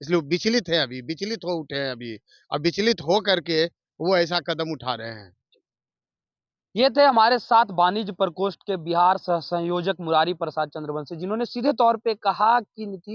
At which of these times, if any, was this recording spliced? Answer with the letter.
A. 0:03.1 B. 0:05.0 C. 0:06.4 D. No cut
D